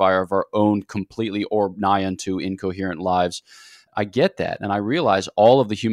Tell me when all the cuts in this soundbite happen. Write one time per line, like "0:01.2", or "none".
0:03.8